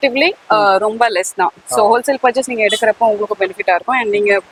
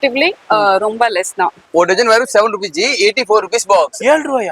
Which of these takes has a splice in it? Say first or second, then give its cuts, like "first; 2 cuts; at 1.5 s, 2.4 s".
second; 1 cut; at 1.6 s